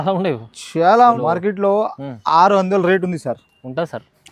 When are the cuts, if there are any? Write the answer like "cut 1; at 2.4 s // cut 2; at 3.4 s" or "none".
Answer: cut 1; at 1.2 s